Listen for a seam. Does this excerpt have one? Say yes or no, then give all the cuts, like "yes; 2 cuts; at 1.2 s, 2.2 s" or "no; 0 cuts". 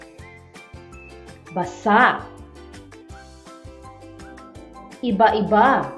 yes; 3 cuts; at 1.5 s, 2.3 s, 4.4 s